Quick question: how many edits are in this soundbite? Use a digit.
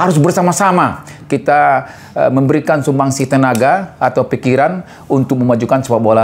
0